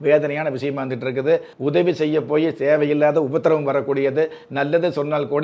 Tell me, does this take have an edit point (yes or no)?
yes